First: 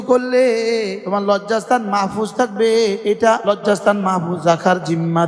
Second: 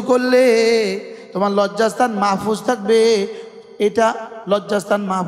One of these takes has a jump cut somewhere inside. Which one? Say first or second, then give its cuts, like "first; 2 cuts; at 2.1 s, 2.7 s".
first; 2 cuts; at 1.0 s, 3.3 s